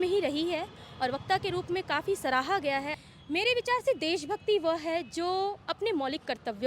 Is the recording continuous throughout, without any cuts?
no; 1 cut; at 2.9 s

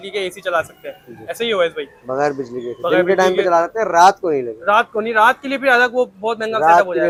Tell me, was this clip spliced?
no; 0 cuts

